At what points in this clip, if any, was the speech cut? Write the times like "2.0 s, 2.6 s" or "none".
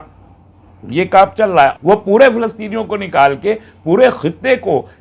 1.7 s